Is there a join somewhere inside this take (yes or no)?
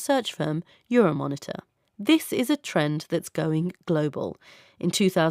no